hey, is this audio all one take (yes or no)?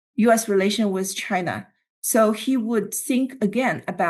yes